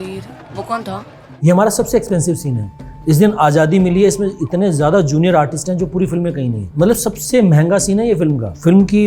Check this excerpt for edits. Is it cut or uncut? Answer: cut